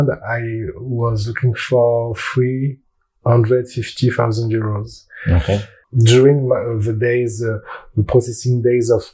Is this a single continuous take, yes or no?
yes